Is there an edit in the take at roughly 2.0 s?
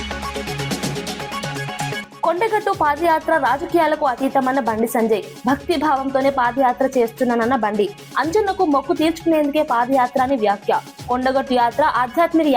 yes; 1 cut; at 2.0 s

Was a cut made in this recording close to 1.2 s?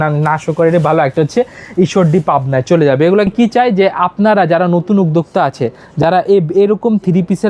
no; 1 cut; at 3.3 s

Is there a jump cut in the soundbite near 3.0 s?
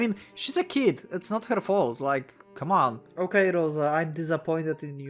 yes; 1 cut; at 3.0 s

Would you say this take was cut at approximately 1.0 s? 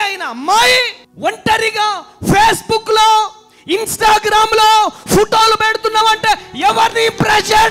yes; 1 cut; at 1.0 s

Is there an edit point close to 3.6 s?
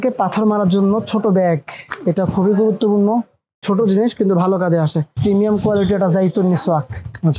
no; 1 cut; at 5.1 s

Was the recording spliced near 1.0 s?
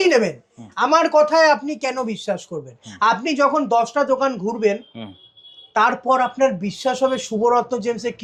no; 0 cuts

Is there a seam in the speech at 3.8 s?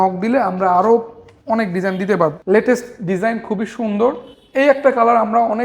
no; 1 cut; at 2.4 s

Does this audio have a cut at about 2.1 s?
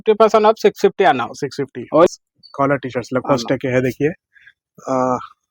yes; 1 cut; at 2.1 s

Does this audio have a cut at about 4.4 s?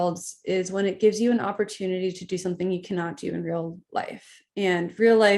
no; 0 cuts

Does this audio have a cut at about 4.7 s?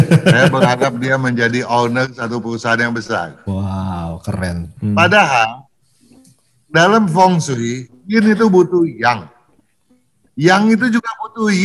yes; 1 cut; at 4.7 s

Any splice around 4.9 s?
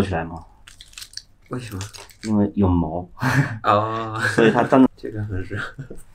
yes; 1 cut; at 4.9 s

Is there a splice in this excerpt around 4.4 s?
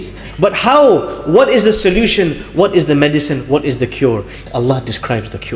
yes; 1 cut; at 4.4 s

